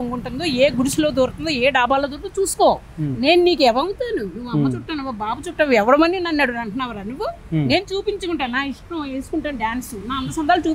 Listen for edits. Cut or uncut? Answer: uncut